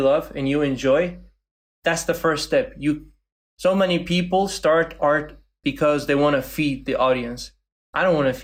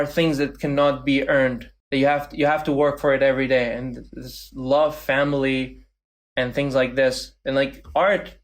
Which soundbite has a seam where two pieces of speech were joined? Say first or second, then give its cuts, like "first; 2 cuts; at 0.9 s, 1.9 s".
second; 1 cut; at 1.7 s